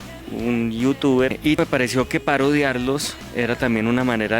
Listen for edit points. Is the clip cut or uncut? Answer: cut